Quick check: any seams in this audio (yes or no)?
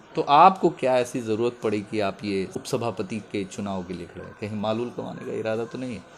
yes